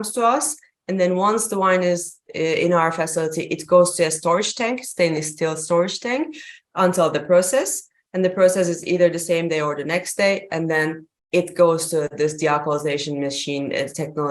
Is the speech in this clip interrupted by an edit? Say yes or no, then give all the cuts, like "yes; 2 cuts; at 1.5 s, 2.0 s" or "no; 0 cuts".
no; 0 cuts